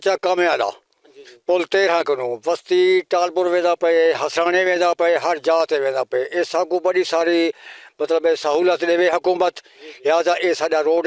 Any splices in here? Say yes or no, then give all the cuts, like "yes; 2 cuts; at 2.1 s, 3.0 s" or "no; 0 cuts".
no; 0 cuts